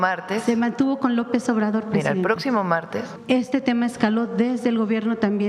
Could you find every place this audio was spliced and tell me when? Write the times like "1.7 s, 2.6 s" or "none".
3.1 s